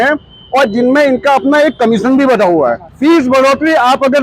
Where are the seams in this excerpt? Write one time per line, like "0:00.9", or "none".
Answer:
0:02.9